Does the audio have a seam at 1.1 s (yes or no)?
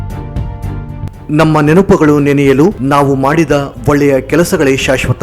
yes